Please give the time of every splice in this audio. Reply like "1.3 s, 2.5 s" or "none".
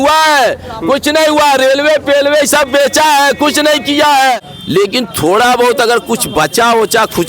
4.4 s